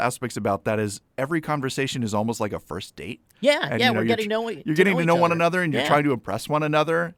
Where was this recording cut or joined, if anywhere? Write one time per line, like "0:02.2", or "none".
none